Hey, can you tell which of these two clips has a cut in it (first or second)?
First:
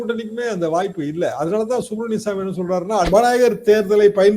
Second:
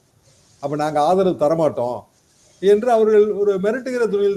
first